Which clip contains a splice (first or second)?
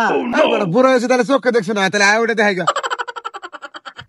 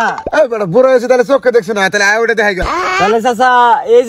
second